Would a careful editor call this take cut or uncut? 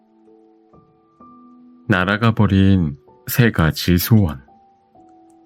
cut